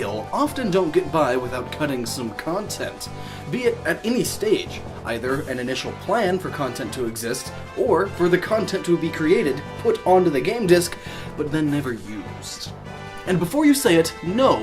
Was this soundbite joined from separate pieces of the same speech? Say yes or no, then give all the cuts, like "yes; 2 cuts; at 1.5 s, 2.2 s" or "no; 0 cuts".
yes; 1 cut; at 10.0 s